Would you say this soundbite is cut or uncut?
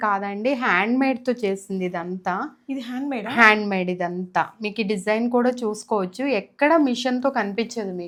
uncut